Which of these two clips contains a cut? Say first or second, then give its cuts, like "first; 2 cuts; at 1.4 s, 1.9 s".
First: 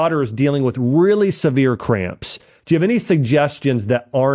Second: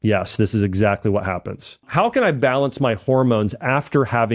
second; 1 cut; at 1.8 s